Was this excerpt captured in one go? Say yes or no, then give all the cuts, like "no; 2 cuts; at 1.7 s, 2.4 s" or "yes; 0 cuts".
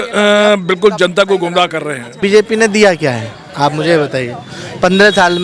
no; 1 cut; at 2.2 s